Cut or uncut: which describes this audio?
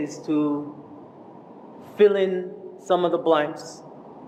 uncut